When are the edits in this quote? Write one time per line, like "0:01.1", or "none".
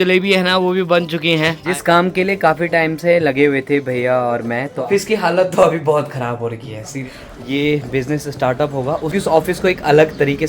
0:01.6
0:04.7
0:07.0
0:09.1